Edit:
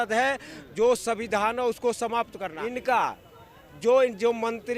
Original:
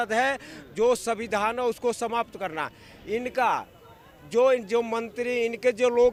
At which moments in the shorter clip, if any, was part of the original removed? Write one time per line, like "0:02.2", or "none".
0:02.5